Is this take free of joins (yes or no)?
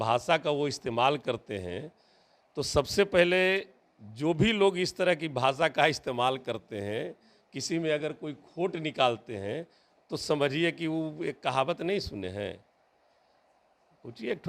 yes